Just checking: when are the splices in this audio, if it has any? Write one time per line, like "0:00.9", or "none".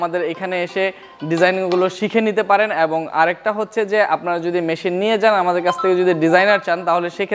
none